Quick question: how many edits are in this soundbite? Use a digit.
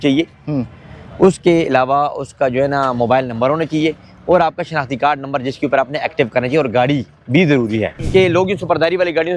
1